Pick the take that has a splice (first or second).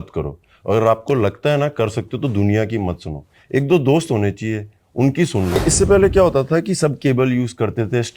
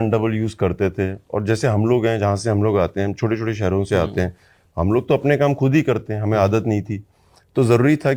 first